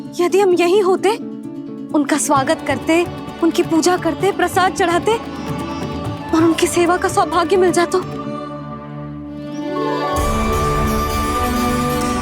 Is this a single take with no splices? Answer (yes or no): no